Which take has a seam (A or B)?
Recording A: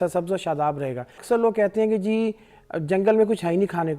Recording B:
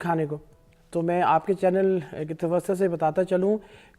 A